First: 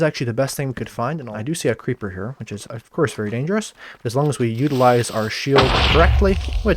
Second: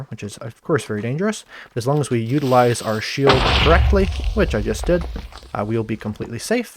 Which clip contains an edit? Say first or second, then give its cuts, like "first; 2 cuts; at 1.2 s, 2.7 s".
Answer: first; 1 cut; at 1.3 s